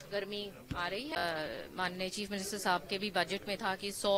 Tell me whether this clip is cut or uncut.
cut